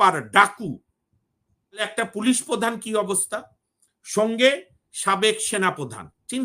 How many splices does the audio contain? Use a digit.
1